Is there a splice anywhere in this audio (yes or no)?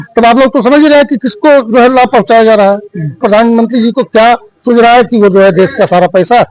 yes